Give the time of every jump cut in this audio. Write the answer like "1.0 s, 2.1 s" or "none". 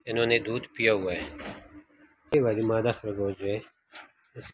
2.3 s